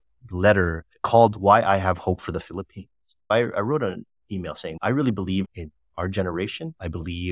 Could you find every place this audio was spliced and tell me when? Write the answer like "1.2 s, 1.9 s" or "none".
3.3 s, 4.8 s